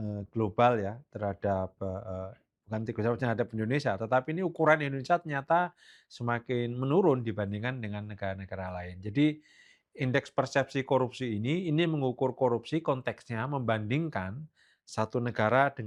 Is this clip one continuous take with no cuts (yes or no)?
yes